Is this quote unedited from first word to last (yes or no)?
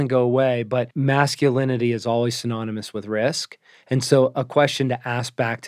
no